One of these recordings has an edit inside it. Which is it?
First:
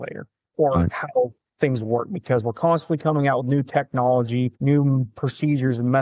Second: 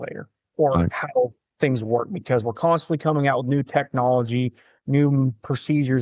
first; 1 cut; at 4.6 s

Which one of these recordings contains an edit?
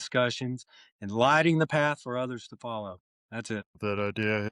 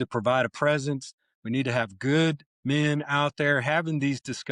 first; 1 cut; at 3.6 s

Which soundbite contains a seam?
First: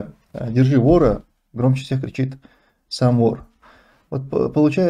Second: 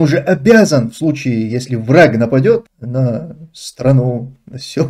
second; 1 cut; at 2.8 s

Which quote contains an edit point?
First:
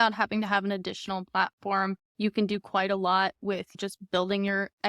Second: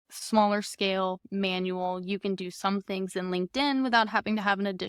first; 2 cuts; at 2.1 s, 3.8 s

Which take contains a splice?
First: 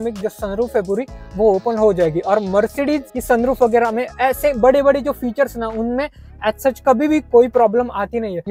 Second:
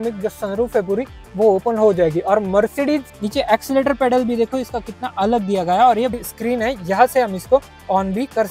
second; 2 cuts; at 3.1 s, 6.2 s

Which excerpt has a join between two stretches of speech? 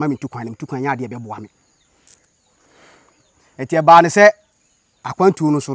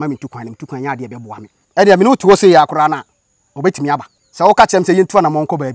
second; 2 cuts; at 1.6 s, 4.2 s

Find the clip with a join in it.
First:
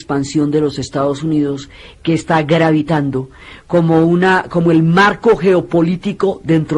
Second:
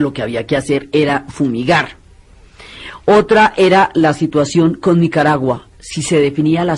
second; 1 cut; at 5.3 s

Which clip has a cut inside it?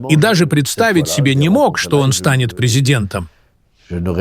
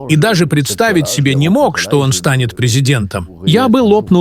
second; 1 cut; at 3.3 s

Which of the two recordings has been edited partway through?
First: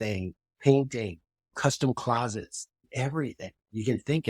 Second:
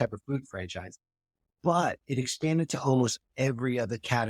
first; 1 cut; at 2.8 s

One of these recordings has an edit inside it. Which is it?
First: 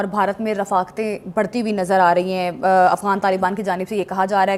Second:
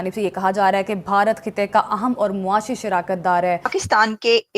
second; 1 cut; at 3.6 s

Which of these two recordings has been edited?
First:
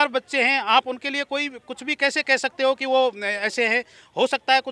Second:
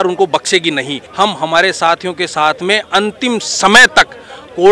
second; 1 cut; at 1.0 s

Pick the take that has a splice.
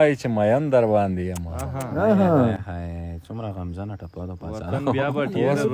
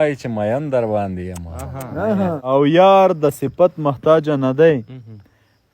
second; 1 cut; at 2.4 s

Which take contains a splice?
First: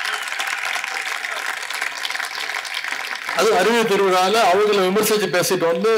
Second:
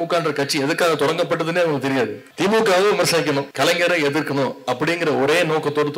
second; 2 cuts; at 2.2 s, 3.5 s

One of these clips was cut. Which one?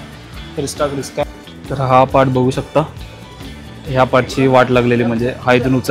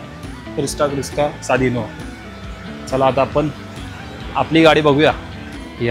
first; 1 cut; at 1.2 s

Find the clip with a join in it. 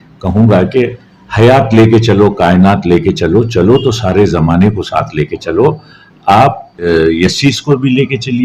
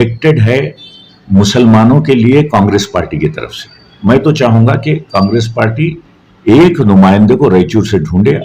first; 1 cut; at 6.9 s

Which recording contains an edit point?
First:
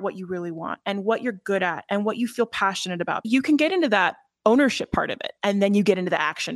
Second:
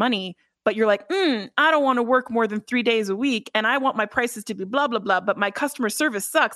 first; 2 cuts; at 3.2 s, 4.2 s

